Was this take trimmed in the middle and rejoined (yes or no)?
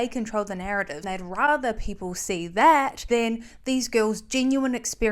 yes